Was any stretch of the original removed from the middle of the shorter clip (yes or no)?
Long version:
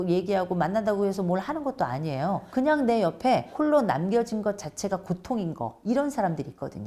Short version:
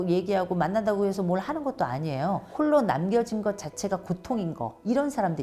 yes